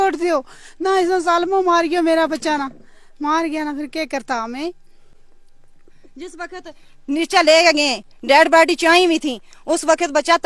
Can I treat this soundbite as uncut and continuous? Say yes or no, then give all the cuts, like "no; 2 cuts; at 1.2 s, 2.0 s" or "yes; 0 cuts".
yes; 0 cuts